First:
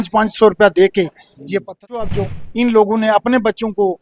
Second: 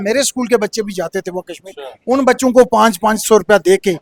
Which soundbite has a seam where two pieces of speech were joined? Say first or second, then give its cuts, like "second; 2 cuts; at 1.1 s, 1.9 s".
first; 1 cut; at 2.1 s